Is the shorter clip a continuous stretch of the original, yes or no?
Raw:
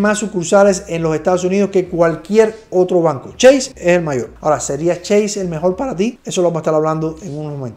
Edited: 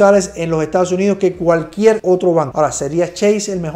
no